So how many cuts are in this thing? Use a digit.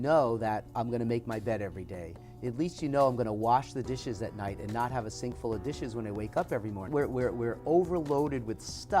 1